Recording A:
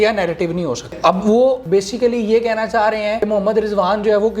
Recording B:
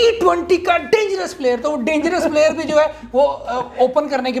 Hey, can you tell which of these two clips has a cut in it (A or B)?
A